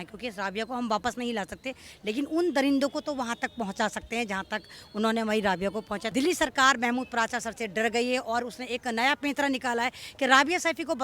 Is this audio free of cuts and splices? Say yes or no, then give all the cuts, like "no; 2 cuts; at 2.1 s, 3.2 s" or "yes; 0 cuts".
no; 1 cut; at 6.1 s